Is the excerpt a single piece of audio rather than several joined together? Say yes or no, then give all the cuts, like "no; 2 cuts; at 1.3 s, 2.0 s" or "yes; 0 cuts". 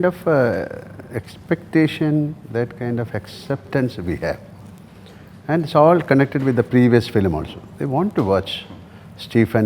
yes; 0 cuts